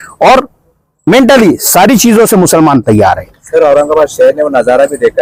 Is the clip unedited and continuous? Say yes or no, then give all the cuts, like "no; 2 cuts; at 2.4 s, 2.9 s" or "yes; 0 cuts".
yes; 0 cuts